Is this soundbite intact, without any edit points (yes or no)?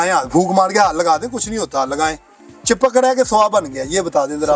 yes